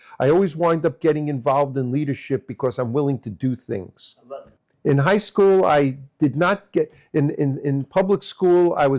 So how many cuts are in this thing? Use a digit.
0